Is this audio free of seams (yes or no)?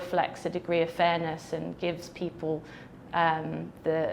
yes